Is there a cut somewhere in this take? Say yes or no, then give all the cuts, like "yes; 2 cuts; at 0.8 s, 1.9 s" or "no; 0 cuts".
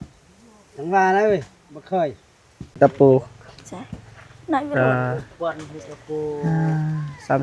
yes; 1 cut; at 2.7 s